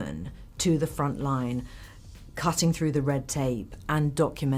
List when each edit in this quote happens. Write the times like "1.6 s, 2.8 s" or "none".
none